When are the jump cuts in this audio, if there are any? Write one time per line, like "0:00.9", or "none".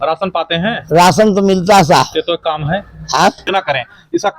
0:03.5